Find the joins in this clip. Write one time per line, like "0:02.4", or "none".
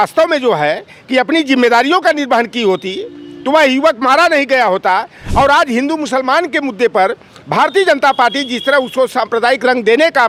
none